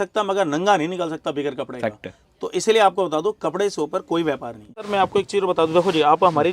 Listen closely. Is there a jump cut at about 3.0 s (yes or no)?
no